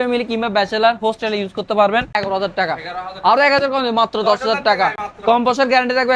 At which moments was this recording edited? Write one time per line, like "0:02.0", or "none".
0:02.2